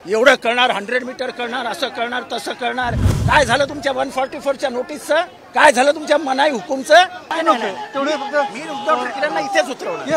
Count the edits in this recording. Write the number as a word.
two